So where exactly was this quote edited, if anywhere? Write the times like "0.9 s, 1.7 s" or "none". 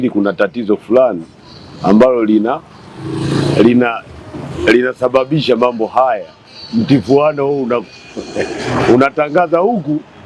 none